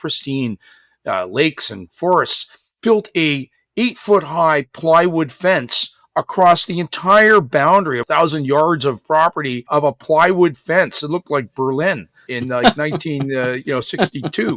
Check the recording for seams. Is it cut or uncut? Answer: cut